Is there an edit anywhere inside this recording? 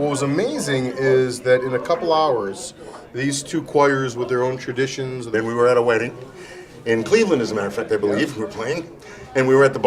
no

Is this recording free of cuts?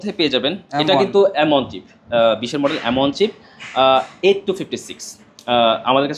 yes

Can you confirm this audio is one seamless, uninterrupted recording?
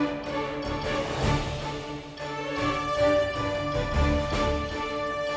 yes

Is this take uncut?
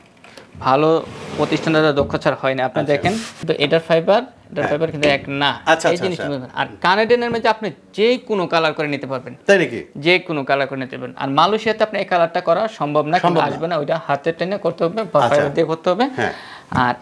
no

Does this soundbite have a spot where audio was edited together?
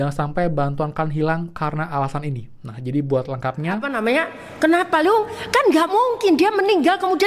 yes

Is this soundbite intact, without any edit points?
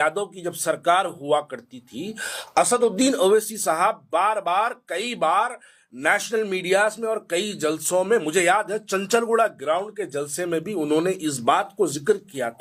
yes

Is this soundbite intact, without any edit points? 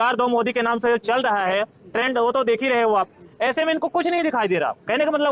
yes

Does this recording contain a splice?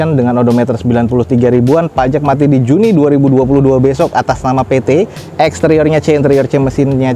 no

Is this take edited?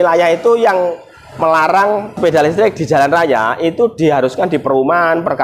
yes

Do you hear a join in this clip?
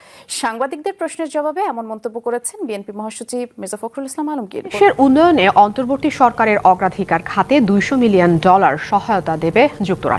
yes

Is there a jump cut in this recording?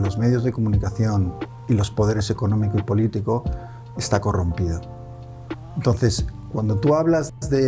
no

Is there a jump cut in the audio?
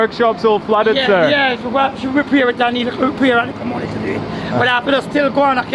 no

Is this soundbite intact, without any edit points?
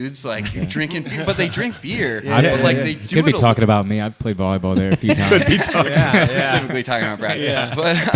yes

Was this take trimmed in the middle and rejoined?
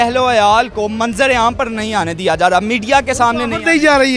no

